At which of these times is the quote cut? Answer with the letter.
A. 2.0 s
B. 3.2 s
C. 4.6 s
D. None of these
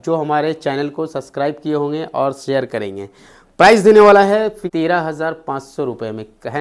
C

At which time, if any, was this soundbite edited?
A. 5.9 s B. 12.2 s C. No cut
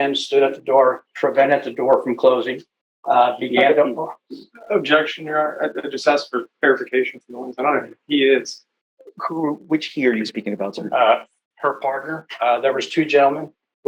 C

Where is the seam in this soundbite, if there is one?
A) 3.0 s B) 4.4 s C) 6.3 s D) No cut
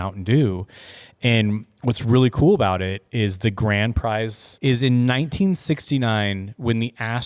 B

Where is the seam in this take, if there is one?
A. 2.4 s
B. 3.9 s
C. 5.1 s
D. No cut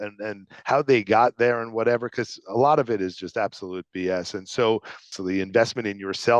C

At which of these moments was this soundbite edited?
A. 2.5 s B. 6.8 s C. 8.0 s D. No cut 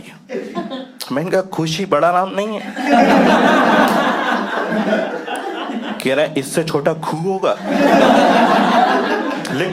D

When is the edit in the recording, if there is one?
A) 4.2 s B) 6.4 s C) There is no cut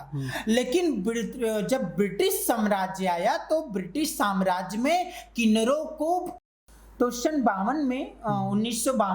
B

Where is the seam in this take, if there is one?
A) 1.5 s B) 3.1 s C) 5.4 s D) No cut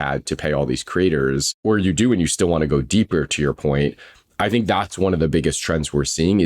A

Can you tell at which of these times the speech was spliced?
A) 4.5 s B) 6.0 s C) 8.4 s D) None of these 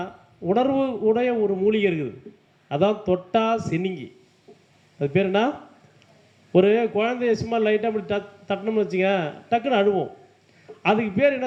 D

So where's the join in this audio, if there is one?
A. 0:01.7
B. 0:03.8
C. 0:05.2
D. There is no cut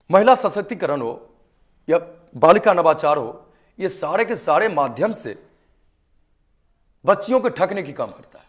D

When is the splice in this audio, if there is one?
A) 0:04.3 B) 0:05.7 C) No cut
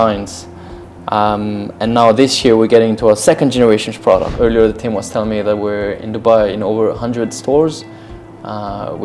A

